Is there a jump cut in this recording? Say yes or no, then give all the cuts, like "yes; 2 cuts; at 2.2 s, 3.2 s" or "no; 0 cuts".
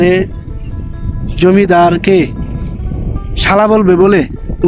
no; 0 cuts